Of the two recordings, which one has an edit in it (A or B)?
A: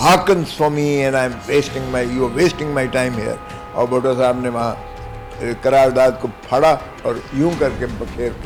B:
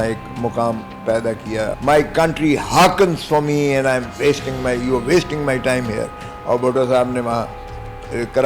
B